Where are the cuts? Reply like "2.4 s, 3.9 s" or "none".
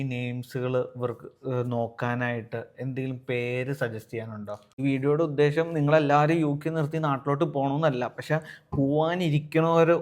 4.7 s